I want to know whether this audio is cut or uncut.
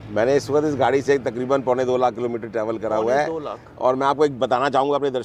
uncut